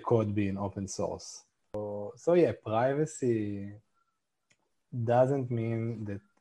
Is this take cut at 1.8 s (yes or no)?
yes